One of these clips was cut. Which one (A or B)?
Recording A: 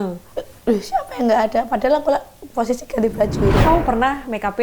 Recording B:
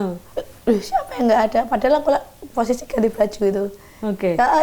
A